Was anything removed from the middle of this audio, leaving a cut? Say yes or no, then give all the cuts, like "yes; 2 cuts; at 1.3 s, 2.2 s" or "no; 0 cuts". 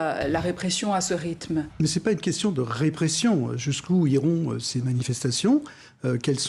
no; 0 cuts